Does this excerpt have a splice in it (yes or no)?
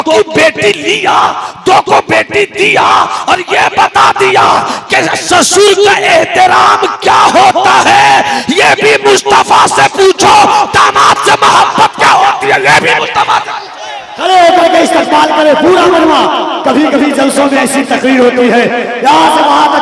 no